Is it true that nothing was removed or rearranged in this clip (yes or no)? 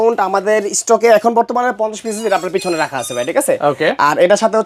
yes